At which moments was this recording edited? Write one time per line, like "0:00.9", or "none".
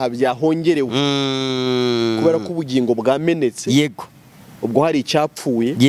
none